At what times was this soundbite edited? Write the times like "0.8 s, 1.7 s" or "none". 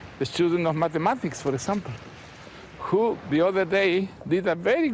2.9 s